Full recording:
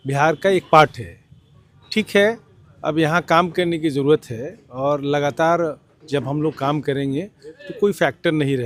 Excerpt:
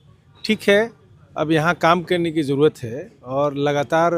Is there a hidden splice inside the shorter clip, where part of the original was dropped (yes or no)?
no